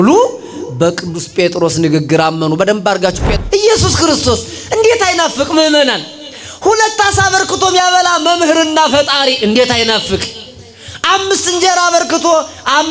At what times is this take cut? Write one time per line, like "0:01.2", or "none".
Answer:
0:03.3

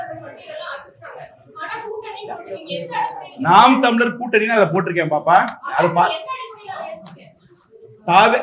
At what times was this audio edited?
none

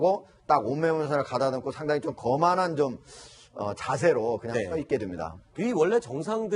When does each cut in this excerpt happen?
0:01.6

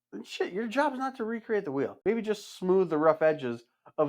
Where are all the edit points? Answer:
0:02.0

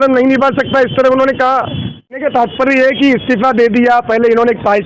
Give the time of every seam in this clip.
0:02.2

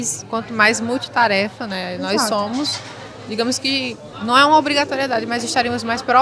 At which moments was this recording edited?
none

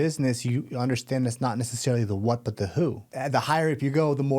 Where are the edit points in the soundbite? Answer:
0:03.1

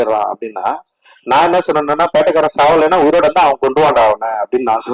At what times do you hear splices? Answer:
none

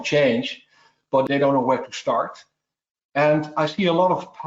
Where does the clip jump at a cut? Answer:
0:01.2

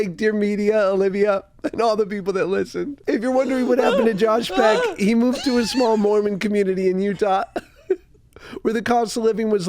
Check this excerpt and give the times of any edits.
0:02.9

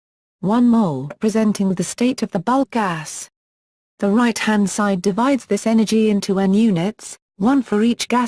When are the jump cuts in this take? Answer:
none

